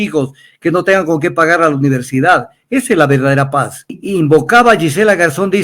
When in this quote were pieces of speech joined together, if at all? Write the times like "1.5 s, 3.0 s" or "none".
4.0 s